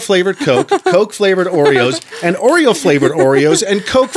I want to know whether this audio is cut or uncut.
uncut